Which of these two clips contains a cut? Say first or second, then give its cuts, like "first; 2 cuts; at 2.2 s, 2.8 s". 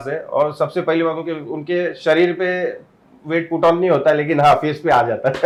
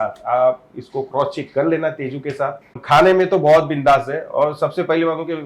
second; 1 cut; at 2.8 s